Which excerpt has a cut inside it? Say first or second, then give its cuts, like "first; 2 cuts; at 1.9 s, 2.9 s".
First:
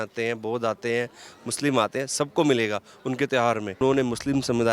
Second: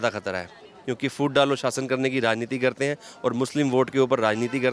first; 1 cut; at 3.7 s